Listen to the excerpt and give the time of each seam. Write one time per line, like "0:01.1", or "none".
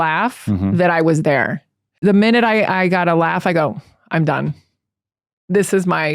0:01.9